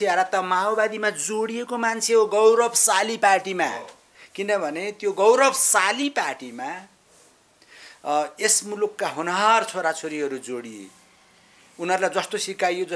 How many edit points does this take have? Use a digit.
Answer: 0